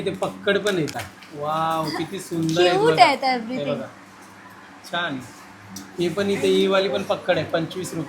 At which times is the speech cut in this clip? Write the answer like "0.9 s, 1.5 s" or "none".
1.0 s